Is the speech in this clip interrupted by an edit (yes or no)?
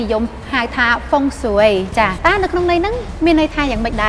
yes